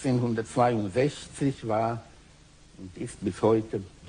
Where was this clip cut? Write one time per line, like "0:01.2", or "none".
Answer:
none